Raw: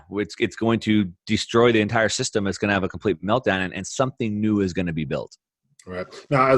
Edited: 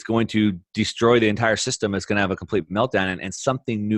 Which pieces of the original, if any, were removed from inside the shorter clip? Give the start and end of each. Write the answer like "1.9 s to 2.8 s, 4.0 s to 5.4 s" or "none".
none